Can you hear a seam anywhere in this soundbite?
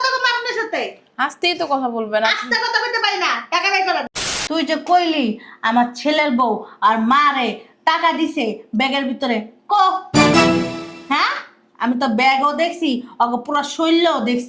yes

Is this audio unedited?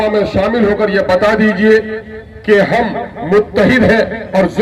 yes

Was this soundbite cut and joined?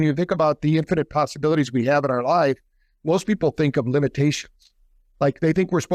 no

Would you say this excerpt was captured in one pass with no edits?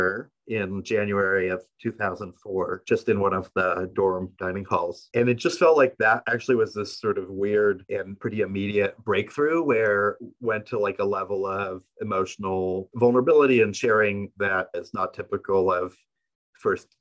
yes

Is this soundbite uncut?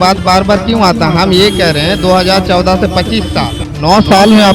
no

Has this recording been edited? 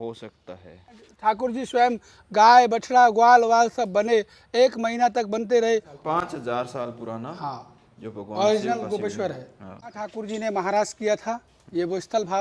yes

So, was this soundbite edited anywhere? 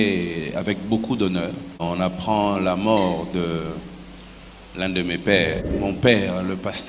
yes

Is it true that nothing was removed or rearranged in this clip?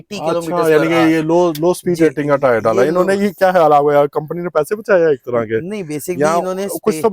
yes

